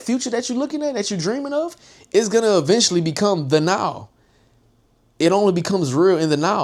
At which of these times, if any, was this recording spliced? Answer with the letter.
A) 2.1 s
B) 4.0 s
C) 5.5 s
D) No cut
D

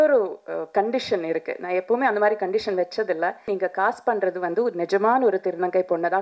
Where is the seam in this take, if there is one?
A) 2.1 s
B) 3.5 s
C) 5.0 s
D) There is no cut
B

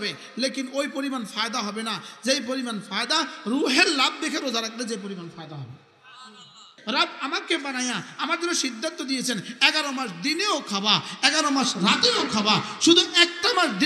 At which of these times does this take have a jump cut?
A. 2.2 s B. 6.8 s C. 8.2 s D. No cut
B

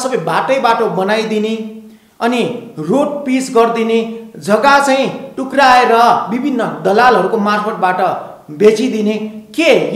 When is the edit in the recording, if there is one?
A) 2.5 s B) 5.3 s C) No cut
C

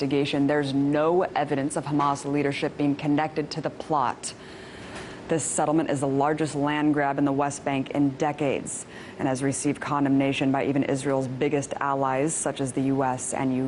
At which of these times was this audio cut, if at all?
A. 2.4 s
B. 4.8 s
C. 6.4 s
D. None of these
A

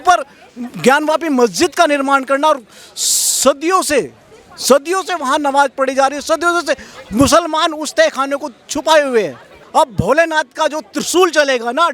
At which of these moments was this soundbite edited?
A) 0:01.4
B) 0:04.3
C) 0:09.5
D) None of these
C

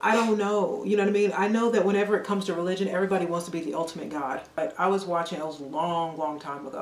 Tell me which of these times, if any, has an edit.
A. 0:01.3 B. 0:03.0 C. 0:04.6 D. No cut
C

